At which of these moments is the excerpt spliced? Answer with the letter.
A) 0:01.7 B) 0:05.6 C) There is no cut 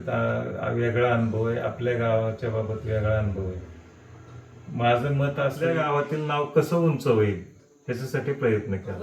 B